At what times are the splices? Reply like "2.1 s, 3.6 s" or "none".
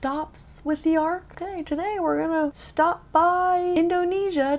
1.4 s, 2.6 s, 3.7 s